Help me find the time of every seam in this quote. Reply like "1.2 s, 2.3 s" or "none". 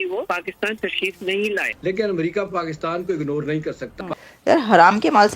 4.3 s

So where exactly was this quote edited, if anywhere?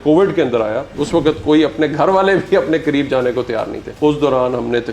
1.0 s, 3.8 s

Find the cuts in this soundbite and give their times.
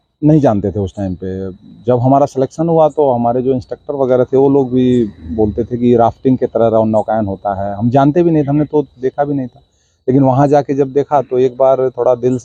none

